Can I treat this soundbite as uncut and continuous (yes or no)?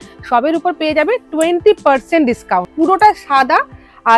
no